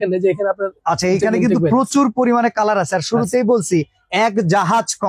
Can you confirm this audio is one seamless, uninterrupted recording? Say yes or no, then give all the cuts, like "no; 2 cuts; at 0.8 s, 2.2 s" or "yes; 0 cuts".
yes; 0 cuts